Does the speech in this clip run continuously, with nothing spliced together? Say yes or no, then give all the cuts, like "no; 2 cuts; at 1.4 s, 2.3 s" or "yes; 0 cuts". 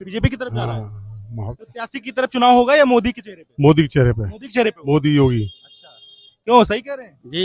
yes; 0 cuts